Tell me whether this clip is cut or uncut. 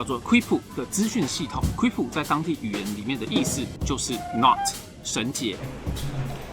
cut